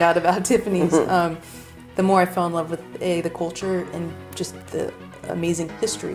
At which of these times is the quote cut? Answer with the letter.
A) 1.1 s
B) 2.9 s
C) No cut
C